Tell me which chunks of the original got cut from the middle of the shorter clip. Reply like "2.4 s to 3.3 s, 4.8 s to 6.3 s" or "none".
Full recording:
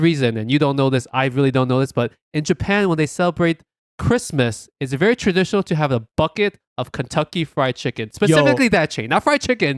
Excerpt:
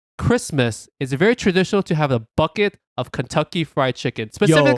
none